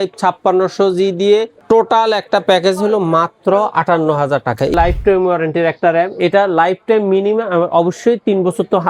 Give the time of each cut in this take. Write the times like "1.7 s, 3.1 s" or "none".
4.7 s